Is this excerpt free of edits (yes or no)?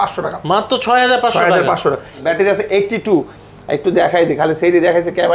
no